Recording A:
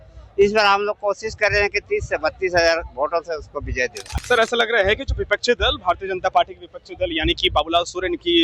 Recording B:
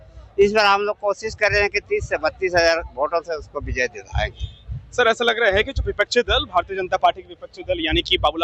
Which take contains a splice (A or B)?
A